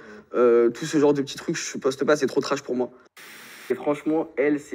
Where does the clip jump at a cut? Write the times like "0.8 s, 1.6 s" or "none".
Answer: 3.1 s

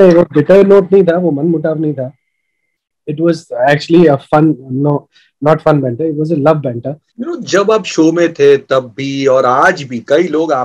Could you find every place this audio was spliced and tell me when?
7.1 s

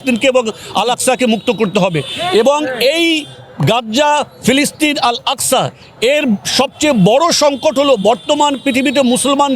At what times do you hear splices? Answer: none

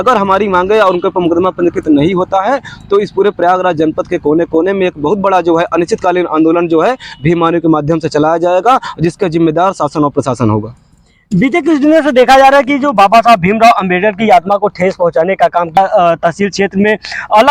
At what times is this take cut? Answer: none

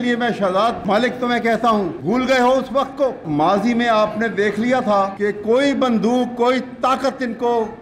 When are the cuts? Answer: 0.8 s, 2.0 s, 3.2 s, 5.1 s

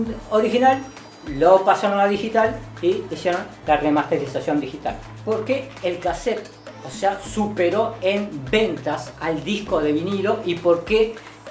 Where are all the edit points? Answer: 5.1 s

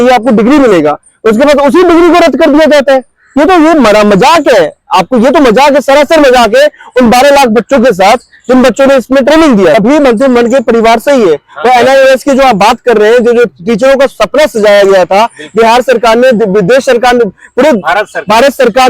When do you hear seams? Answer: 9.7 s

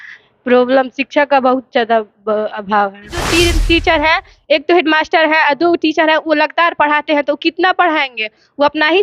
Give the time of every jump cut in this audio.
3.2 s

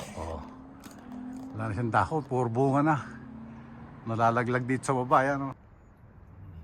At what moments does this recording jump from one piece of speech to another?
5.7 s

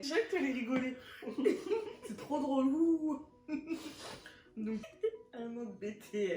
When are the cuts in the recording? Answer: 4.8 s

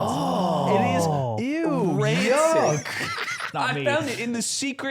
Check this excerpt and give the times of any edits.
3.5 s

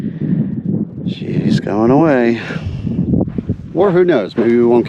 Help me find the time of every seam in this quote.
3.6 s

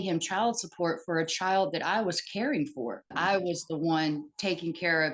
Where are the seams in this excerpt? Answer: 3.1 s

